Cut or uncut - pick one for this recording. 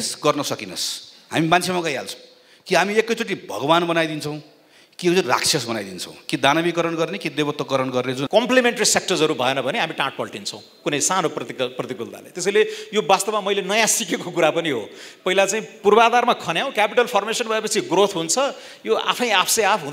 cut